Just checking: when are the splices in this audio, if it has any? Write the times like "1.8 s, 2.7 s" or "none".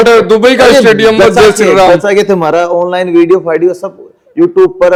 none